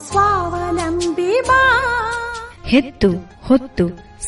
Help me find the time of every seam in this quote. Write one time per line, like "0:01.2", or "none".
0:02.0

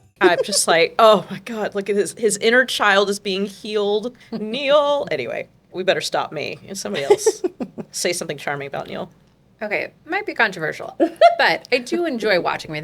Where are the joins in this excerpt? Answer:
0:04.2
0:05.4
0:07.8
0:09.8

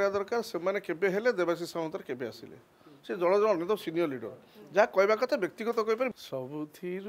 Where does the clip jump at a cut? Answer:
0:06.1

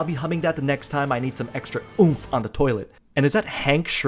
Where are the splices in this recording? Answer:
0:03.0

